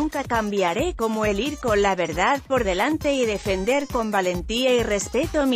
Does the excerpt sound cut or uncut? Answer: uncut